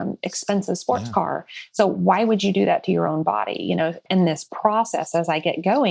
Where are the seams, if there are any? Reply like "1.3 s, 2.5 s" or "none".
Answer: 4.0 s